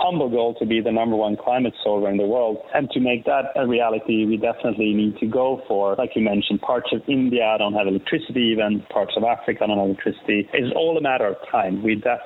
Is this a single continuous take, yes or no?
yes